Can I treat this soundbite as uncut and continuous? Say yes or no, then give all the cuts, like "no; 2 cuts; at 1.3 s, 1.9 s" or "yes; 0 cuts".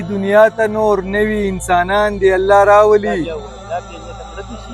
yes; 0 cuts